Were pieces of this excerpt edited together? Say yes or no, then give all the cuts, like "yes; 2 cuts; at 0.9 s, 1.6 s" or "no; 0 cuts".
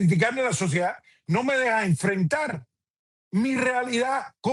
no; 0 cuts